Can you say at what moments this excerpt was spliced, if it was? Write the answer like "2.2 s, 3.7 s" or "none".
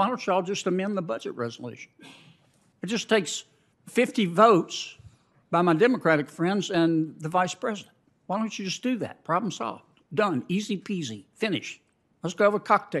none